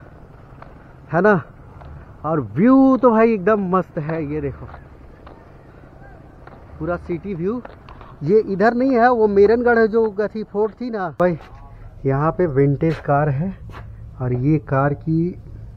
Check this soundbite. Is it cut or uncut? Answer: cut